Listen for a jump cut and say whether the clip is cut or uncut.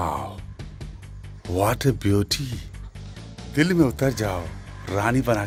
uncut